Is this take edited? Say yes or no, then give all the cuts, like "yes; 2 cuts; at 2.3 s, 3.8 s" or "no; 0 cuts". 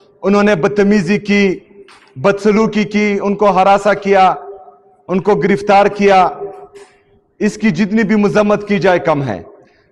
no; 0 cuts